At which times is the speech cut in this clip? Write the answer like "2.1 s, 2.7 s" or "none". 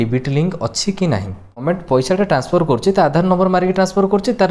1.6 s